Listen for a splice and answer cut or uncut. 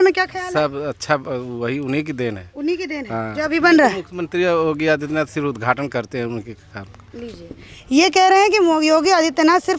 uncut